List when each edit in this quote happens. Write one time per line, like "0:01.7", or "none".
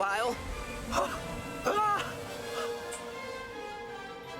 none

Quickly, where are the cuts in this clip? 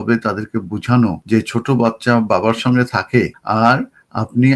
0:01.2
0:03.4

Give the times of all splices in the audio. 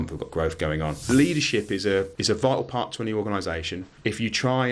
0:01.0
0:02.2
0:03.8

